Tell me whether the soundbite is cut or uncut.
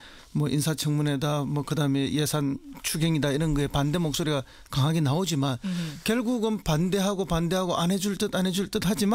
uncut